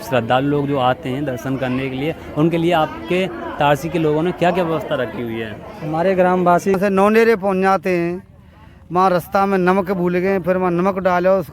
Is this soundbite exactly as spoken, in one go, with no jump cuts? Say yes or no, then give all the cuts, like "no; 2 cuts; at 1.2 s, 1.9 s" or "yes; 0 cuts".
no; 1 cut; at 6.7 s